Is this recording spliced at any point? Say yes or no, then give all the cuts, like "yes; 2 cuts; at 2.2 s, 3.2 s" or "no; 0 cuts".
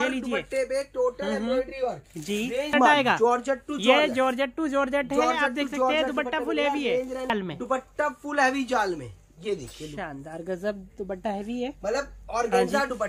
yes; 2 cuts; at 2.7 s, 7.3 s